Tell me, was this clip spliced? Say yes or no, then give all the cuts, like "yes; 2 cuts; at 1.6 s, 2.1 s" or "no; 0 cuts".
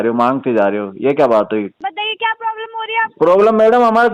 yes; 1 cut; at 1.7 s